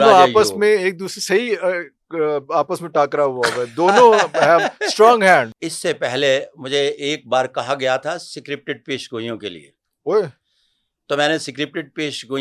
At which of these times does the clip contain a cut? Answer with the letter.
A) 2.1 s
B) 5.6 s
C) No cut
B